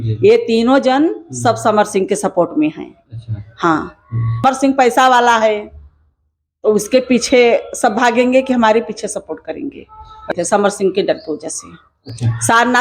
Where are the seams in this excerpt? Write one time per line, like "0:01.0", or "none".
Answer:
0:04.4
0:10.3

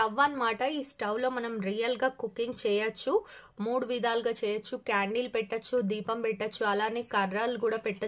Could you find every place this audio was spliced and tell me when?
none

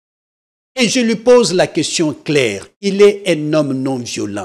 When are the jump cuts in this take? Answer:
none

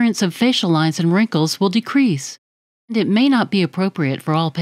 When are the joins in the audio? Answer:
0:02.9

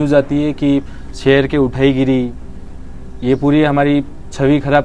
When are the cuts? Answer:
none

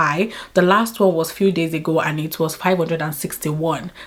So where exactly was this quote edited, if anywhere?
none

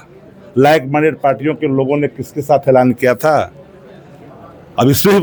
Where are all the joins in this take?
none

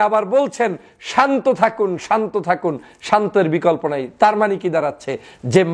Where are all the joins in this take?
none

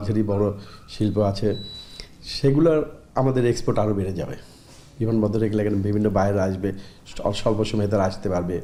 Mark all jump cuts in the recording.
none

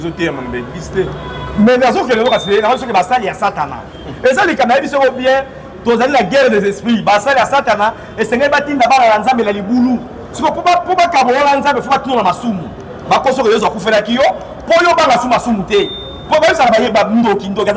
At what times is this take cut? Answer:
none

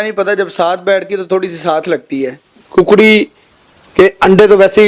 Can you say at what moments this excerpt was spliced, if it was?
0:02.5

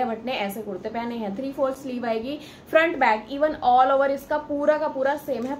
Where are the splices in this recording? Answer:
none

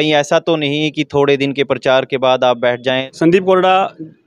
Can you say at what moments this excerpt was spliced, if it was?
0:03.0

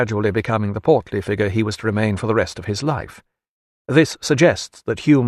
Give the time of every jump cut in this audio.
none

